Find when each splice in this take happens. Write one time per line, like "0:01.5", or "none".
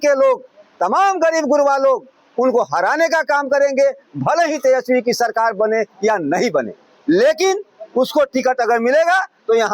none